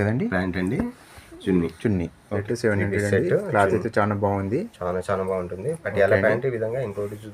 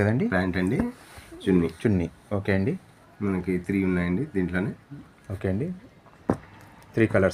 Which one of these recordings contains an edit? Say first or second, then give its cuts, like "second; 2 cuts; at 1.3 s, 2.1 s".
first; 1 cut; at 2.4 s